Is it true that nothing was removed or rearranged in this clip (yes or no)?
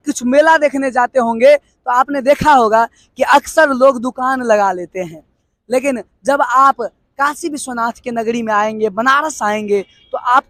yes